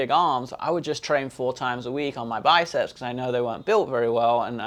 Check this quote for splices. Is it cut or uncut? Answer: uncut